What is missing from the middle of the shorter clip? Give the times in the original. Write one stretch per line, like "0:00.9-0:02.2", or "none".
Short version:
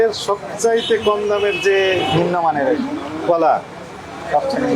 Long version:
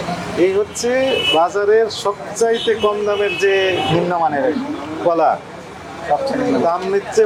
none

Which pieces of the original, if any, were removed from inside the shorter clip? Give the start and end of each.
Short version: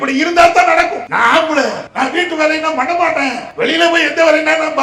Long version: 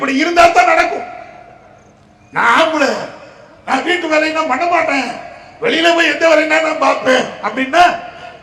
0:01.0-0:02.3
0:03.1-0:03.6
0:05.2-0:05.5

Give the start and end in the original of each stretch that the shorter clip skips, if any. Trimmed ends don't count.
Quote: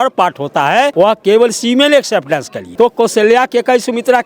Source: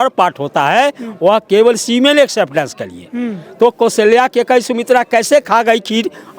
0:00.9-0:01.2
0:02.8-0:03.4

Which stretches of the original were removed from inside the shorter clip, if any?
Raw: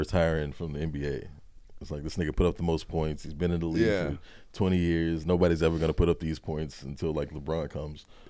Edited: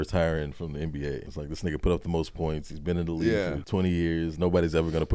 0:01.3-0:01.9
0:04.1-0:04.5

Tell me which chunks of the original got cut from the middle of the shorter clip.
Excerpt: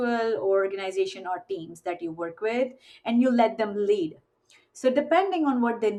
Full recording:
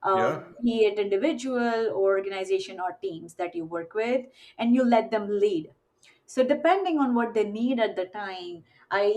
none

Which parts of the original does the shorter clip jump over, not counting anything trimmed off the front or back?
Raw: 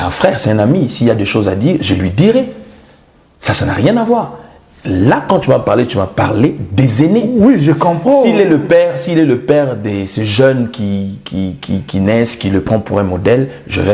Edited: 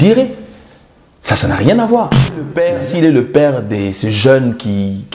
0:04.7-0:08.7

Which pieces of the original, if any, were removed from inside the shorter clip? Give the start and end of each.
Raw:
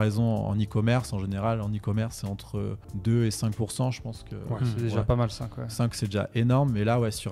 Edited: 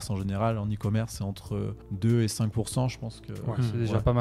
none

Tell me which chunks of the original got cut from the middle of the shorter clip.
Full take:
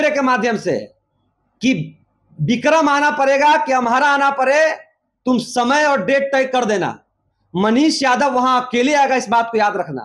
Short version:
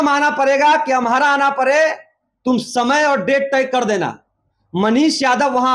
none

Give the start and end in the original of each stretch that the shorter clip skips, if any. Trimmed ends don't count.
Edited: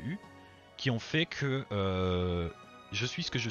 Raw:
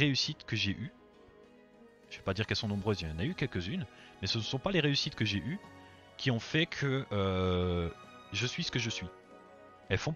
none

